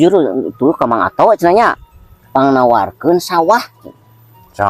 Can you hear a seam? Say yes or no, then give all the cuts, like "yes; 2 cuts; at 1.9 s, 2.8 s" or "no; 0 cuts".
no; 0 cuts